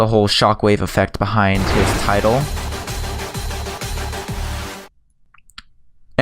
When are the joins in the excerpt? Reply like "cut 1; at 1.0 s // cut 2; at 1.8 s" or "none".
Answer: cut 1; at 2.0 s

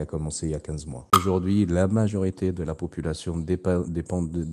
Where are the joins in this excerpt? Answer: cut 1; at 1.1 s

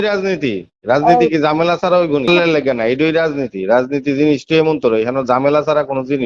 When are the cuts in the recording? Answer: cut 1; at 2.3 s

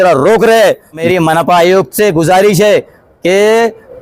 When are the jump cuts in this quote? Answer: cut 1; at 1.0 s

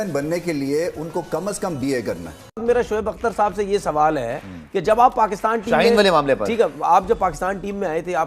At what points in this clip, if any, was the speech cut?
cut 1; at 2.5 s

